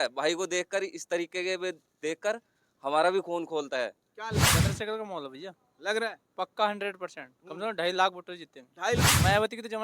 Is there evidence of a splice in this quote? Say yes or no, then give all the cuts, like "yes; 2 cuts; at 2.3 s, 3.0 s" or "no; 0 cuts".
yes; 2 cuts; at 4.4 s, 9.0 s